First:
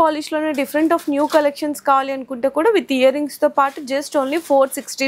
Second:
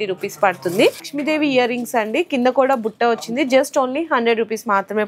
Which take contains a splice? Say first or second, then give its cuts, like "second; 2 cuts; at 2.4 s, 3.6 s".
second; 1 cut; at 1.1 s